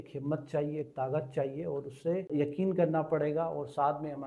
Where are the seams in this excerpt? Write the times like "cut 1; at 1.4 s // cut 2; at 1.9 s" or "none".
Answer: cut 1; at 2.3 s